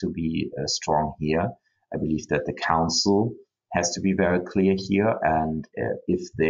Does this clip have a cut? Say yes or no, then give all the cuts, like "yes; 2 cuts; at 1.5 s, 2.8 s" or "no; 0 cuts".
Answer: no; 0 cuts